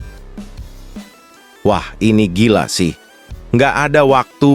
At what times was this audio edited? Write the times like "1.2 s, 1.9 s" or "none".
1.5 s